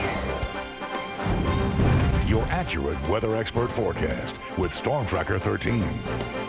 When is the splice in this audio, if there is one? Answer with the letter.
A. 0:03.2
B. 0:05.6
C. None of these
B